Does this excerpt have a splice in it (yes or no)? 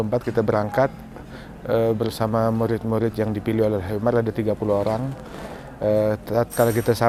no